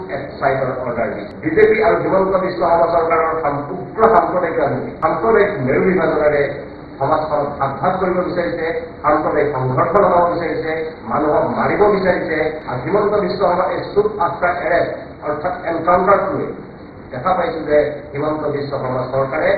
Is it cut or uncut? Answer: cut